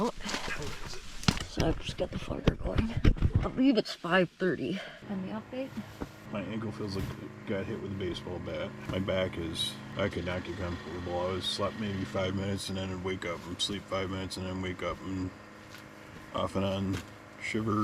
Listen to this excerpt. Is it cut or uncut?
cut